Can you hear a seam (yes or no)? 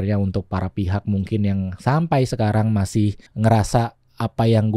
yes